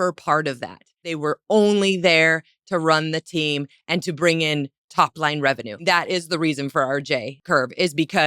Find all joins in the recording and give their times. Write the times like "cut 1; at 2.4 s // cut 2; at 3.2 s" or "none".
cut 1; at 1.1 s // cut 2; at 5.8 s // cut 3; at 7.4 s